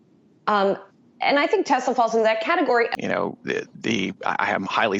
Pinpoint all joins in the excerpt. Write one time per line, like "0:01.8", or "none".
0:02.9